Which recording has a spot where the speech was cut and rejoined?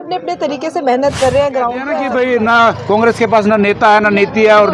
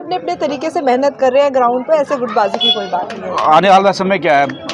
first; 1 cut; at 2.0 s

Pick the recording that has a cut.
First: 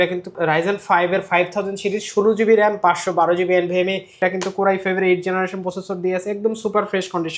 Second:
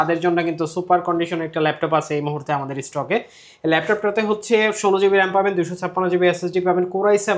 first; 1 cut; at 4.2 s

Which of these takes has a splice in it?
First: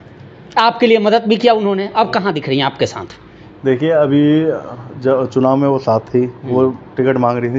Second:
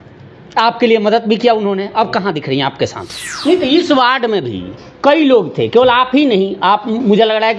second; 1 cut; at 3.3 s

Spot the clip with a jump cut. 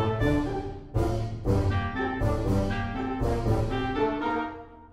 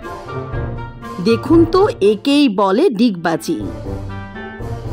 second; 2 cuts; at 1.2 s, 3.7 s

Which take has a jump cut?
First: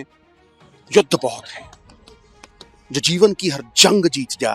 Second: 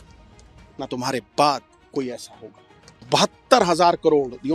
second; 1 cut; at 3.0 s

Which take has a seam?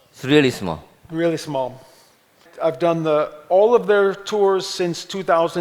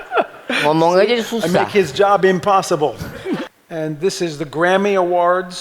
second; 1 cut; at 3.5 s

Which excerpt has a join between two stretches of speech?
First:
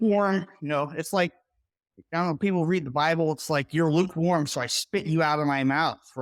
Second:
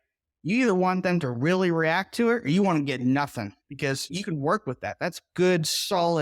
second; 1 cut; at 4.9 s

